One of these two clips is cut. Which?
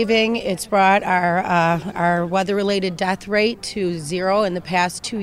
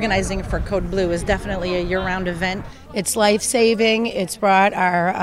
second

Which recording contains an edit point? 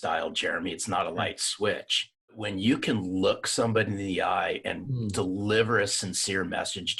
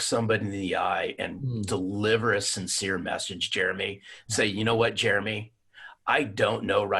first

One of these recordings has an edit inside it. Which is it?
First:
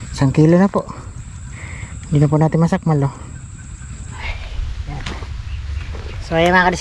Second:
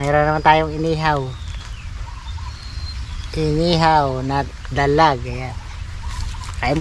first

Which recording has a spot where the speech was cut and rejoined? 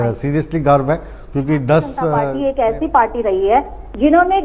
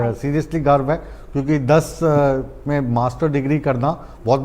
first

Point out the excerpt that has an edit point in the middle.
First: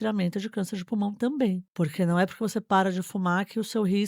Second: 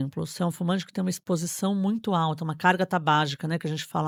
first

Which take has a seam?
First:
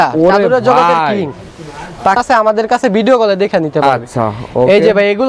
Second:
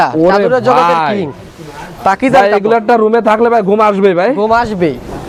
first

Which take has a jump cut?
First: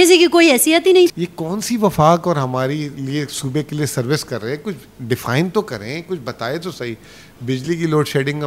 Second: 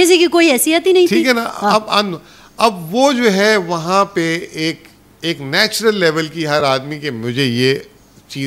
first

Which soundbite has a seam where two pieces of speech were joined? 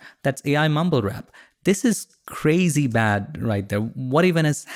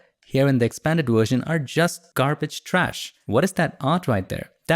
second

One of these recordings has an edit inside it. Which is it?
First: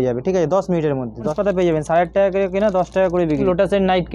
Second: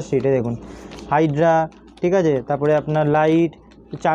first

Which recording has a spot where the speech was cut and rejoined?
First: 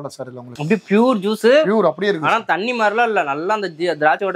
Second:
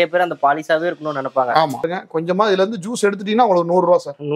second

